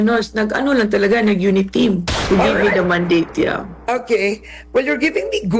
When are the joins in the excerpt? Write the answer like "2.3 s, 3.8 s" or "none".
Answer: 2.1 s